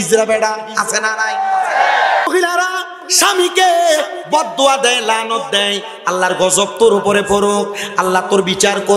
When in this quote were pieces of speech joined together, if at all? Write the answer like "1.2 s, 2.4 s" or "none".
2.3 s